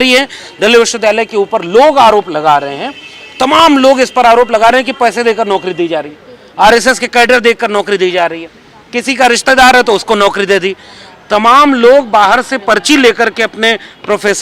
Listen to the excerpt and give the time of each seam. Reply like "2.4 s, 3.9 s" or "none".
none